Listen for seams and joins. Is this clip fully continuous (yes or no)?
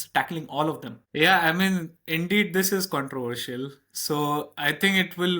no